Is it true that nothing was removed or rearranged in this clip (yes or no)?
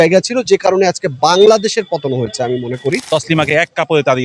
no